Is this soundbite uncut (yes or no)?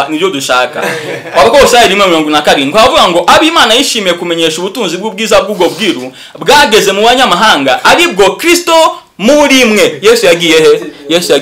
yes